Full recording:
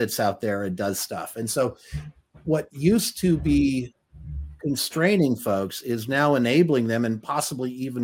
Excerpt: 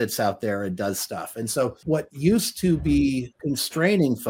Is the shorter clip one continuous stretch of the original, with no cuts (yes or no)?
no